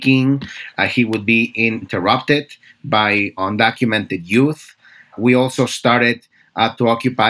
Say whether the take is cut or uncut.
cut